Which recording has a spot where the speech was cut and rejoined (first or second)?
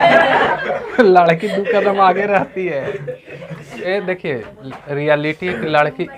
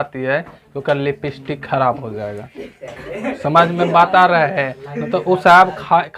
first